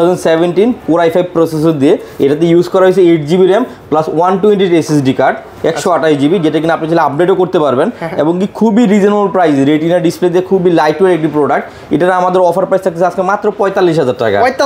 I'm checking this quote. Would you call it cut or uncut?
uncut